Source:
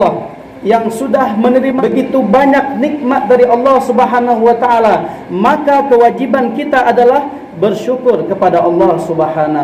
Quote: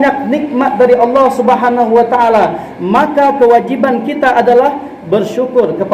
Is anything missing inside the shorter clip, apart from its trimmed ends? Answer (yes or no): no